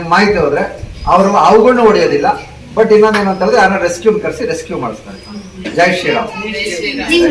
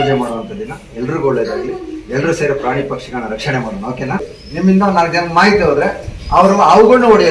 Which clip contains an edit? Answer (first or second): second